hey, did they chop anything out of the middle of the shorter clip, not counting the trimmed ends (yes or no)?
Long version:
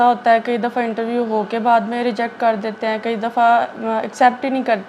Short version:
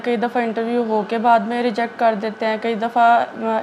no